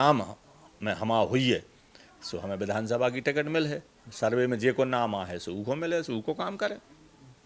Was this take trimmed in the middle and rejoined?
no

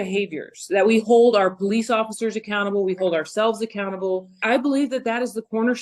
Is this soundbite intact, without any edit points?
no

